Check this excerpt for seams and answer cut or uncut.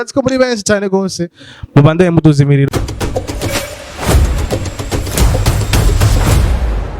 cut